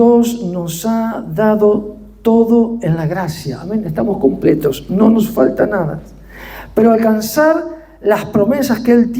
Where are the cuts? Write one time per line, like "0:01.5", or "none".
none